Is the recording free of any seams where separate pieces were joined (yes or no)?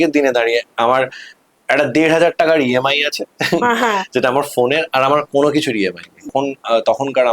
no